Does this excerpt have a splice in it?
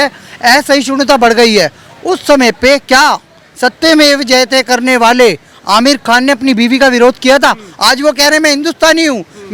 no; 0 cuts

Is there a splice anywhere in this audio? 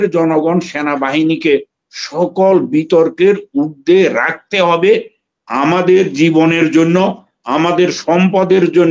no; 0 cuts

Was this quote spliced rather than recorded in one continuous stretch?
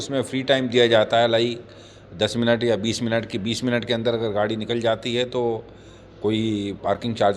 no; 0 cuts

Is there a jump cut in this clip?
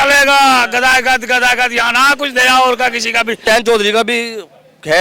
yes; 1 cut; at 3.4 s

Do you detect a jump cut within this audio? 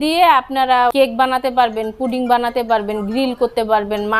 yes; 1 cut; at 0.9 s

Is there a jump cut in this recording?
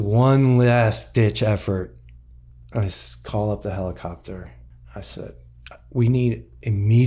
no; 0 cuts

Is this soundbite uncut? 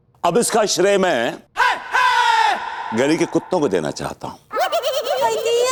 yes; 0 cuts

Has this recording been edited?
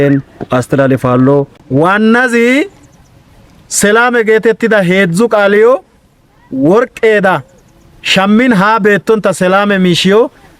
yes; 1 cut; at 1.6 s

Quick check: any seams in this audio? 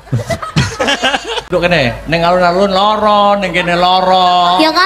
yes; 1 cut; at 1.5 s

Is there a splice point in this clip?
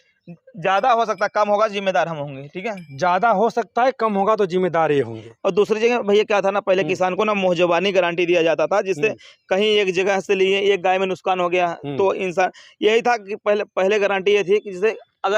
no; 0 cuts

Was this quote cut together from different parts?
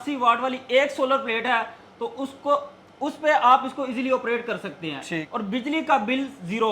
yes; 1 cut; at 5.3 s

